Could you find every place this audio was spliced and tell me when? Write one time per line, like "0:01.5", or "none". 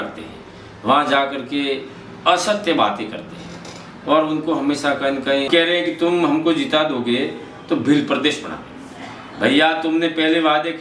0:05.5